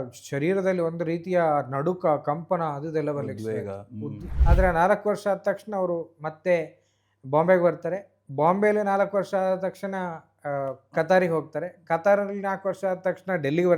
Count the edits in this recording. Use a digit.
1